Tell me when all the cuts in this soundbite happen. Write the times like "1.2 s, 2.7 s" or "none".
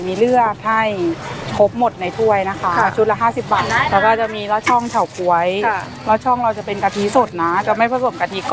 3.6 s